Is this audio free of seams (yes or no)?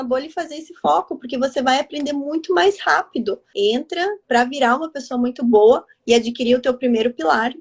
no